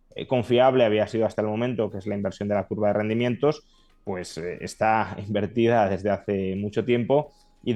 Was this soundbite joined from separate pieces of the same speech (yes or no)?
no